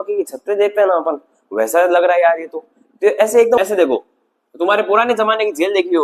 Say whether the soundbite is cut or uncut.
cut